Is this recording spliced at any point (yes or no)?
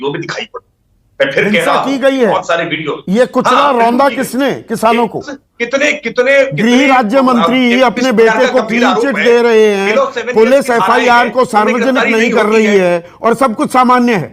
yes